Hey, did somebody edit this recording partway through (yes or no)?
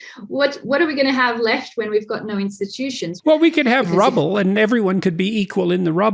yes